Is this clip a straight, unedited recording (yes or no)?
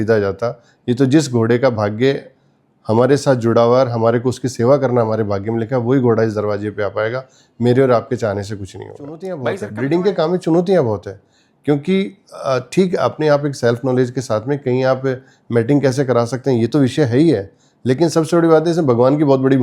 no